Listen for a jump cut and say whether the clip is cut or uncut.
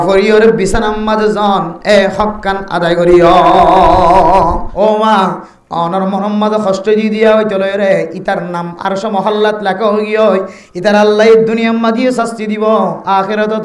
cut